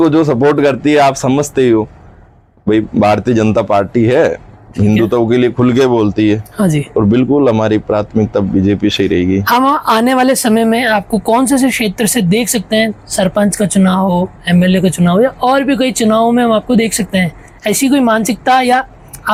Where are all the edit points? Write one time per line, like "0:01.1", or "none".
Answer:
none